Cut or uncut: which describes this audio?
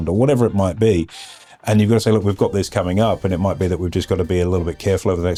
uncut